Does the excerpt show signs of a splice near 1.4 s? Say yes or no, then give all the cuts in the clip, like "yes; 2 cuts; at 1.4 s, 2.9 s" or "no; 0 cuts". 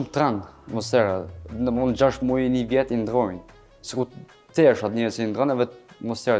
no; 0 cuts